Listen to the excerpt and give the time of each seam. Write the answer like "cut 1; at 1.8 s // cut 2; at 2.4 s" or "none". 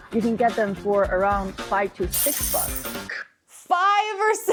none